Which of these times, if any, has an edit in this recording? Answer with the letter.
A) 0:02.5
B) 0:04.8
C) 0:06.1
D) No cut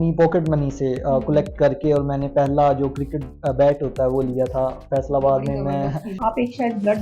C